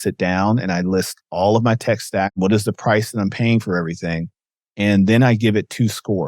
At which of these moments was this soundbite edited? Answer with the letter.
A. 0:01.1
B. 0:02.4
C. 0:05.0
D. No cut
B